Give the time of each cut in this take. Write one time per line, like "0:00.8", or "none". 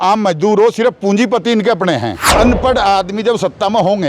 0:02.2